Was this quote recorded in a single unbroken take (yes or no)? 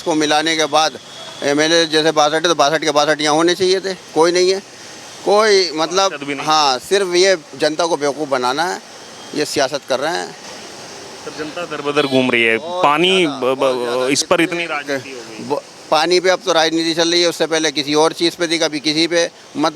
yes